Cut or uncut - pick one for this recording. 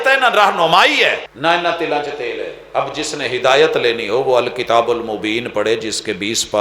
cut